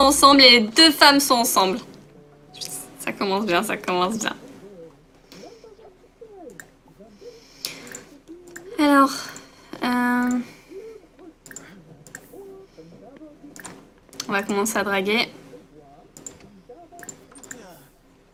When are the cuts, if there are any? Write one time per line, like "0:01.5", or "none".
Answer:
none